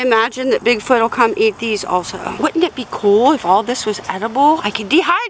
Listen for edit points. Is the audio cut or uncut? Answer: cut